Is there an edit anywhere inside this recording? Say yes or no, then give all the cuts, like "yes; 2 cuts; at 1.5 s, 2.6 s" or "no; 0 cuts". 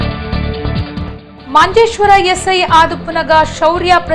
yes; 1 cut; at 1.1 s